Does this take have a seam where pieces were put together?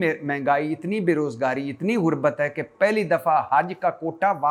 no; 0 cuts

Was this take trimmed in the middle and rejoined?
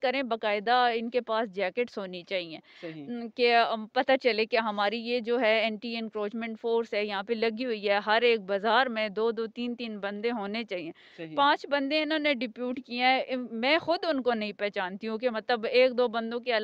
no; 0 cuts

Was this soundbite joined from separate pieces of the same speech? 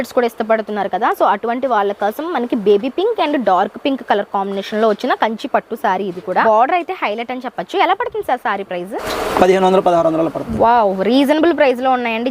yes; 2 cuts; at 6.4 s, 9.1 s

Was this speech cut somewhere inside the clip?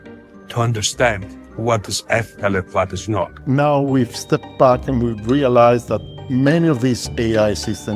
yes; 1 cut; at 3.4 s

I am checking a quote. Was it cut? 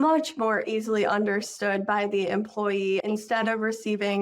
yes; 1 cut; at 3.0 s

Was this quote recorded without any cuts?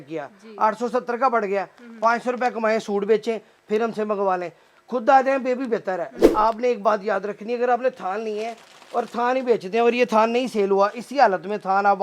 no; 1 cut; at 6.3 s

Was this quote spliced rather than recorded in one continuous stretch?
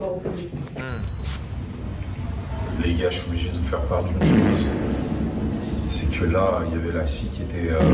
no; 0 cuts

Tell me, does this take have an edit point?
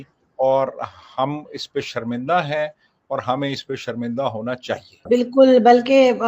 yes; 1 cut; at 5.1 s

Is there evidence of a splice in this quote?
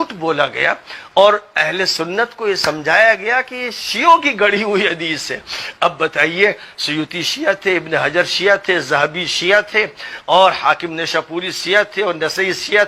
no; 0 cuts

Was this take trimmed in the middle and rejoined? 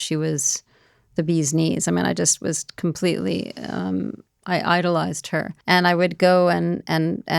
yes; 1 cut; at 5.5 s

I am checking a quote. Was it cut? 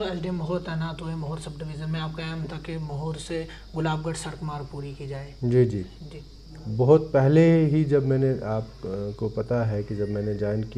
no; 0 cuts

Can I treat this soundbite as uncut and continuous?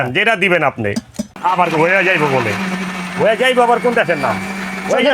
no; 1 cut; at 1.4 s

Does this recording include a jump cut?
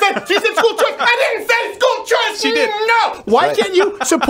yes; 1 cut; at 3.2 s

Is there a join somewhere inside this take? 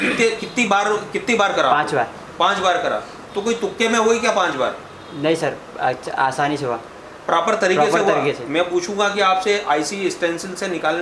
no; 0 cuts

